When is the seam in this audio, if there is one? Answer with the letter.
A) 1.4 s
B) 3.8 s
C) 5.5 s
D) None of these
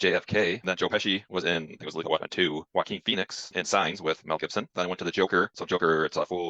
D